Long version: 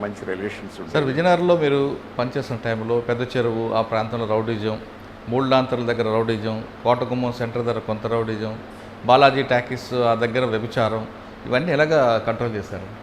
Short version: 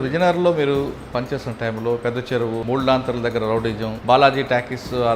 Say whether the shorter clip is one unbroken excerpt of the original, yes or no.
no